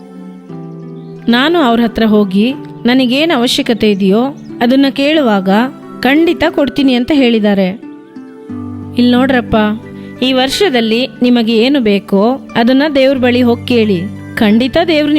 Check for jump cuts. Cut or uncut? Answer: uncut